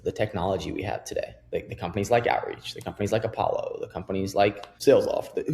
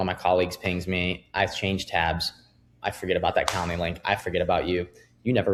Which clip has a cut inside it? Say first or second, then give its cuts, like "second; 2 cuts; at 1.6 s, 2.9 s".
first; 2 cuts; at 1.4 s, 4.7 s